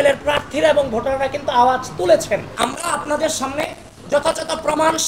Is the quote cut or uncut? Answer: cut